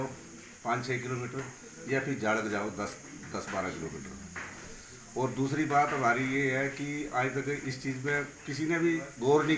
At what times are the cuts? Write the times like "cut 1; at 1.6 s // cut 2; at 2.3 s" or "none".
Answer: none